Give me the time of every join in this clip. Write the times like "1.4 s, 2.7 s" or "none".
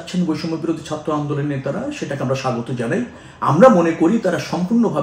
none